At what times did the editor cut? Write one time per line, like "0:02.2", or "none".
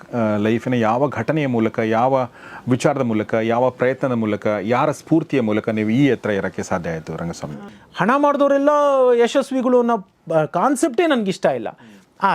0:07.4

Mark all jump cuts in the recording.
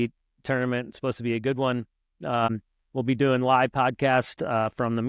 0:02.5

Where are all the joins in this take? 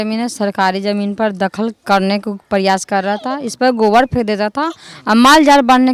none

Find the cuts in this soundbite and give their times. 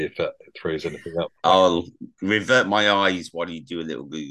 0:01.4

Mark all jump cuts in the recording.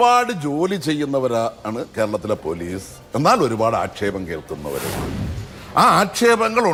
none

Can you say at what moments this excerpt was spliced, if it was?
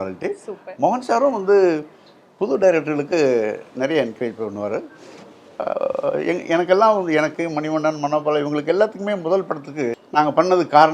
0:10.0

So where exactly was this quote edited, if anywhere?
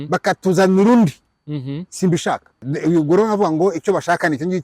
0:02.6

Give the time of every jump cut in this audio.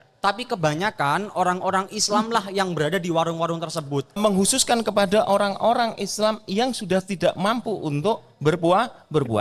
0:04.2

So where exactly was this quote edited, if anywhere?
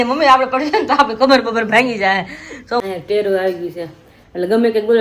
0:02.8

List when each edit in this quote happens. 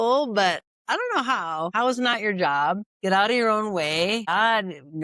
0:01.7
0:02.9
0:04.3

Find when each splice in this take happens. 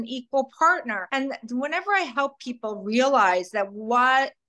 0:01.0

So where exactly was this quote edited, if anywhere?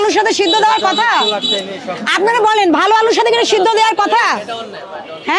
none

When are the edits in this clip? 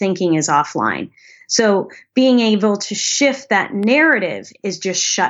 none

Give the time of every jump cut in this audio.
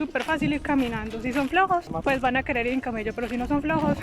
0:01.9

